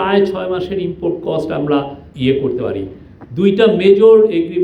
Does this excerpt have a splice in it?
yes; 1 cut; at 2.0 s

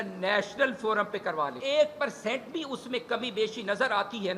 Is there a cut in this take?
yes; 1 cut; at 1.6 s

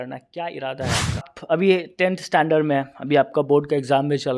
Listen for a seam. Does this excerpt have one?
yes; 1 cut; at 1.3 s

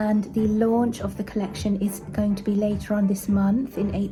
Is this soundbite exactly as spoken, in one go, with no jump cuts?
yes; 0 cuts

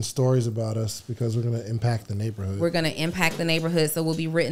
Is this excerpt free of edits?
yes; 0 cuts

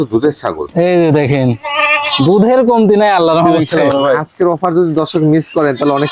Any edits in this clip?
yes; 1 cut; at 3.5 s

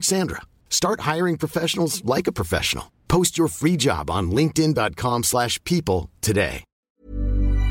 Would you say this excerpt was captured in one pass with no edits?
no; 1 cut; at 6.7 s

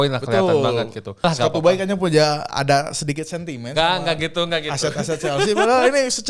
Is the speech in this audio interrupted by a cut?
yes; 1 cut; at 1.2 s

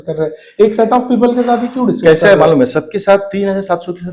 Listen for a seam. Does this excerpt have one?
no; 0 cuts

